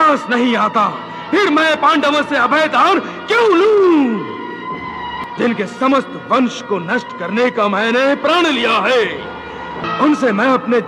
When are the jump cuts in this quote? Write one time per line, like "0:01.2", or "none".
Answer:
0:05.2
0:09.8